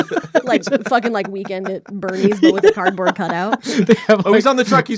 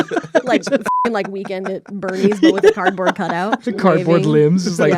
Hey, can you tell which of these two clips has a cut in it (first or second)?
second